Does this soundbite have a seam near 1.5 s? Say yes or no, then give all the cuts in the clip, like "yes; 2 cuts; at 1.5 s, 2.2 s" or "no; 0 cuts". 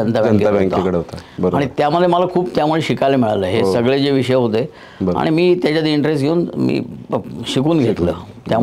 no; 0 cuts